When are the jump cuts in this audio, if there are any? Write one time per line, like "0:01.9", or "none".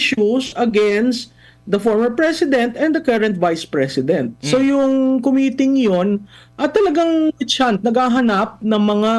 0:04.4